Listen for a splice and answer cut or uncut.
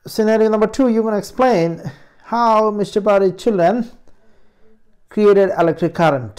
uncut